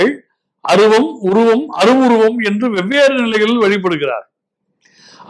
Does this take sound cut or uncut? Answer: uncut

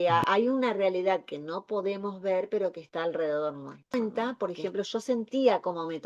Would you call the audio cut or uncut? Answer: cut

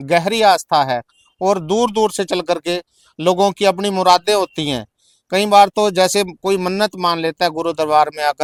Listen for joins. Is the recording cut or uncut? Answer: uncut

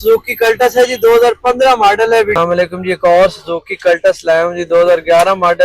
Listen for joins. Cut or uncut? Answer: cut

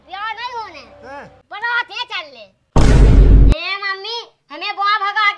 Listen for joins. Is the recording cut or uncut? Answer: cut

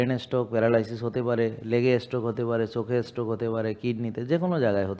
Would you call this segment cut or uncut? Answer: uncut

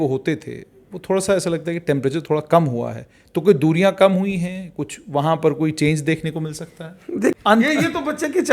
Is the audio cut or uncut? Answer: cut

